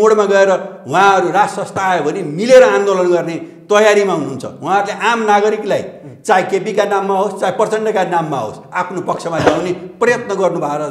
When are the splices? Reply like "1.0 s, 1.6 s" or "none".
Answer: none